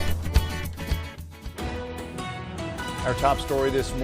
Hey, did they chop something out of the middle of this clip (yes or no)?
yes